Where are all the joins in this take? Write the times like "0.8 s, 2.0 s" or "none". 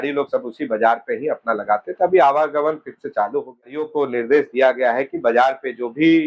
3.9 s

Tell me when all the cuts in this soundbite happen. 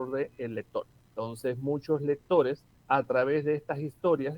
1.0 s, 2.7 s

